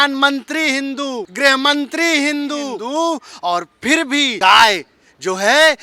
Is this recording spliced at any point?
yes; 3 cuts; at 1.3 s, 2.8 s, 4.3 s

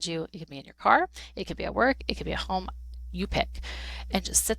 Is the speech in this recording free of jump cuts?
yes; 0 cuts

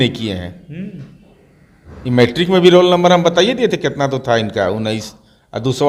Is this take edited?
no; 0 cuts

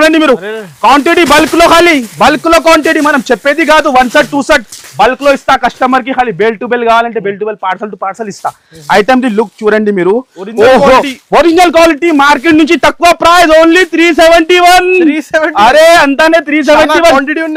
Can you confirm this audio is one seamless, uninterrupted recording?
yes; 0 cuts

